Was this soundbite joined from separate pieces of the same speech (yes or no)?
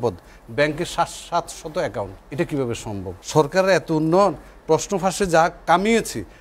yes